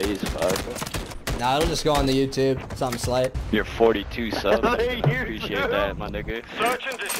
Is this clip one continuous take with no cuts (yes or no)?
no